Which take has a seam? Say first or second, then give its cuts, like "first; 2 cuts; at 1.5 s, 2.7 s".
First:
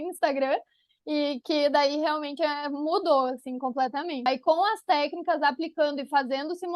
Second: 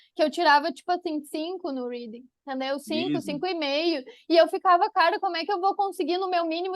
first; 1 cut; at 4.3 s